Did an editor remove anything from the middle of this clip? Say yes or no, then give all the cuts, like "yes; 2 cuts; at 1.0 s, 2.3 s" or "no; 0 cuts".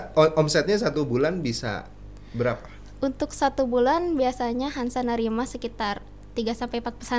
no; 0 cuts